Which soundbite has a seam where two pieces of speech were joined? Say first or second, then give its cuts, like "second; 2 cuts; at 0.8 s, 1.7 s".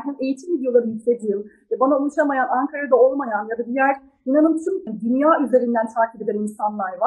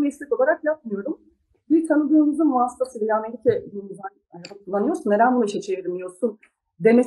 first; 1 cut; at 4.9 s